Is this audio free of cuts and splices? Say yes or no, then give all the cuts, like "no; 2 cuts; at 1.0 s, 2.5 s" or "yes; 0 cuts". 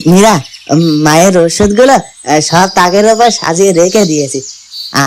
yes; 0 cuts